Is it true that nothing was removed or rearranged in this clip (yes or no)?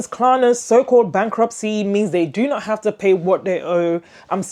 yes